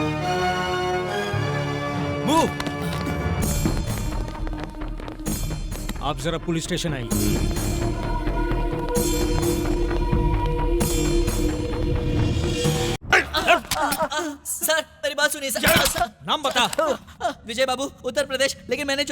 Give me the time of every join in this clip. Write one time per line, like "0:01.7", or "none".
0:13.1